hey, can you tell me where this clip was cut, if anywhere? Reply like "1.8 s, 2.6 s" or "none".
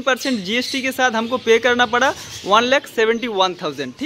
none